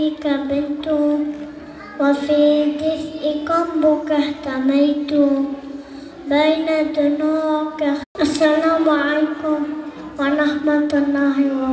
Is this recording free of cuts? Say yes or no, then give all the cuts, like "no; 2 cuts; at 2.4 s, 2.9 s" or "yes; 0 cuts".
yes; 0 cuts